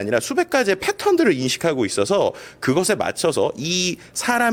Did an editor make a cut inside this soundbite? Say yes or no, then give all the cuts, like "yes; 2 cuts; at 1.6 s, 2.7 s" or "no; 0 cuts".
no; 0 cuts